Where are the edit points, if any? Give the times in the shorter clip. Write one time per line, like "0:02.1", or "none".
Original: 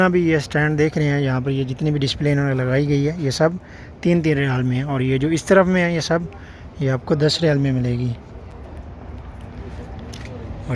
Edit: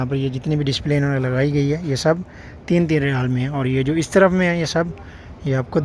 none